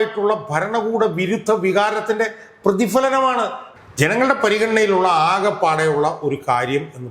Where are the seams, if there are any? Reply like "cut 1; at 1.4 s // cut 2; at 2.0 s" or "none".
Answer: cut 1; at 3.6 s